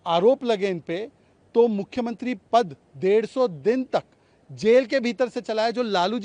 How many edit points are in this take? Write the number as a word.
zero